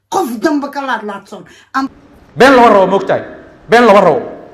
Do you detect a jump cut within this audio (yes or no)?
yes